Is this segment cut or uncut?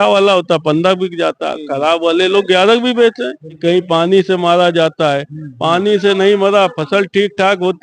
cut